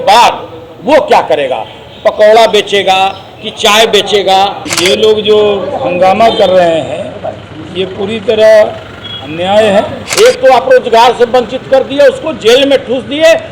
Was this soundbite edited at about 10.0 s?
yes; 2 cuts; at 4.7 s, 10.0 s

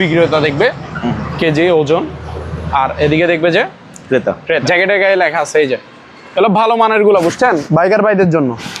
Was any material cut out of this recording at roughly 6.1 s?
no; 1 cut; at 4.6 s

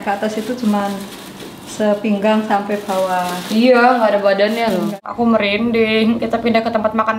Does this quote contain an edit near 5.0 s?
yes; 1 cut; at 5.0 s

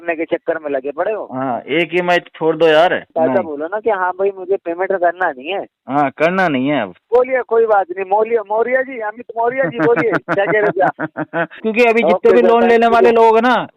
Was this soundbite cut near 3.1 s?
yes; 3 cuts; at 3.1 s, 7.0 s, 11.6 s

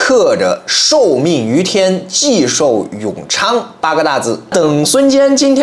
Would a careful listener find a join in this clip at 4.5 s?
yes; 1 cut; at 4.5 s

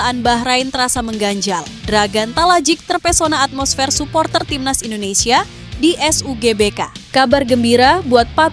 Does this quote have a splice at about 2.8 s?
no; 1 cut; at 6.9 s

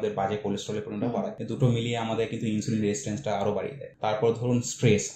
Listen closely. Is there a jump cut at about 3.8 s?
yes; 2 cuts; at 1.4 s, 3.8 s

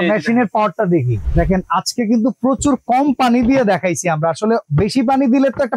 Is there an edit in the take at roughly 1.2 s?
yes; 1 cut; at 1.2 s

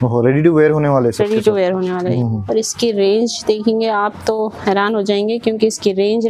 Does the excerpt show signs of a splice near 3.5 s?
no; 1 cut; at 2.1 s

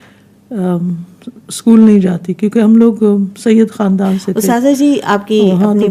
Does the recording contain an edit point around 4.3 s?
yes; 1 cut; at 4.3 s

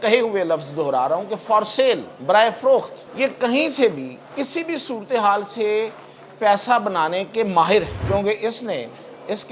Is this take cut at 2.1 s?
yes; 3 cuts; at 2.1 s, 3.0 s, 8.0 s

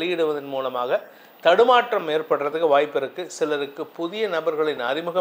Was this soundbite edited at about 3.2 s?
no; 0 cuts

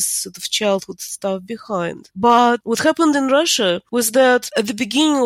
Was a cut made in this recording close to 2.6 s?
yes; 3 cuts; at 2.6 s, 3.8 s, 4.5 s

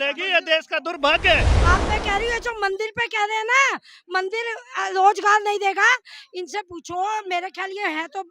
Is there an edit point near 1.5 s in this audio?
yes; 1 cut; at 1.5 s

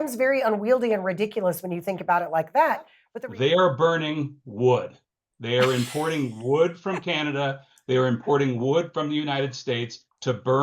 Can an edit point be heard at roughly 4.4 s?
no; 1 cut; at 3.0 s

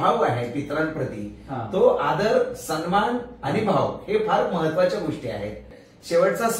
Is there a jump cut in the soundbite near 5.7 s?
yes; 1 cut; at 5.7 s

